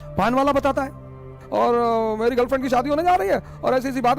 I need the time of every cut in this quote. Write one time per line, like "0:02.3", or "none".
0:01.3